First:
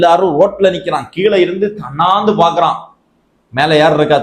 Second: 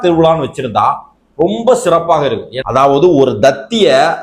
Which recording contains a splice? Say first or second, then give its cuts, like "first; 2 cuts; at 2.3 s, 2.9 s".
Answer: second; 1 cut; at 2.5 s